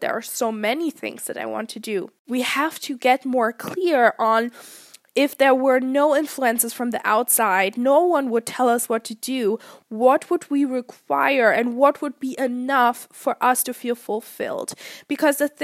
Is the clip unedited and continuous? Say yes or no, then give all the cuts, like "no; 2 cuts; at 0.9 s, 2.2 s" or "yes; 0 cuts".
no; 1 cut; at 2.2 s